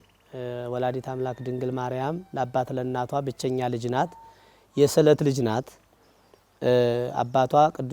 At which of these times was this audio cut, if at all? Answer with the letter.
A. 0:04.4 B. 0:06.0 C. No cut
C